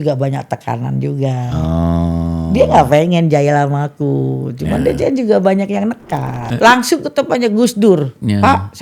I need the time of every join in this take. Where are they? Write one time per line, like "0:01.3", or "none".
0:06.4